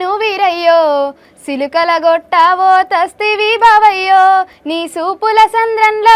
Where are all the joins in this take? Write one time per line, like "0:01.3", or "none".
none